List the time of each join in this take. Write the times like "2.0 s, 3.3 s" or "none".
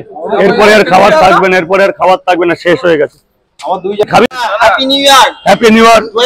4.3 s